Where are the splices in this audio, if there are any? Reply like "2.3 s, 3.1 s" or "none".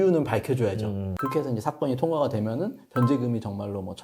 1.1 s